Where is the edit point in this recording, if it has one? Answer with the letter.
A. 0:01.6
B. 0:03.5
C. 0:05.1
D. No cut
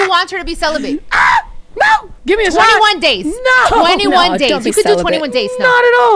A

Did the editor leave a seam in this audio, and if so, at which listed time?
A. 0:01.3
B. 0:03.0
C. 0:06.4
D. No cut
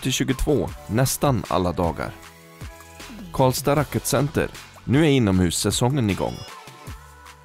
C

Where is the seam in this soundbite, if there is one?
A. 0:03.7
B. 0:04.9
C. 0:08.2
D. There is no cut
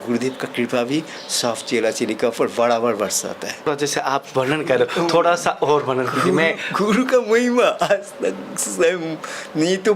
A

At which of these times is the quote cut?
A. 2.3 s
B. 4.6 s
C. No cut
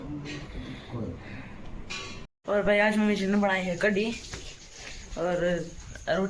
A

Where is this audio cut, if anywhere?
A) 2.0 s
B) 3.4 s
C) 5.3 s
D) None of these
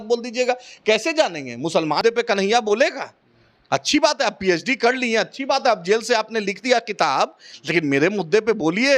A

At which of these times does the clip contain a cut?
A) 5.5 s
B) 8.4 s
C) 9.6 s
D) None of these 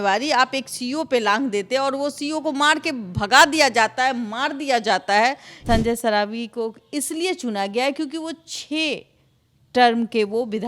A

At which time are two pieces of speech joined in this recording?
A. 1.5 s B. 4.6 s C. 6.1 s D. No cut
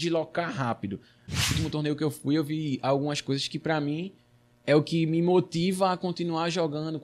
A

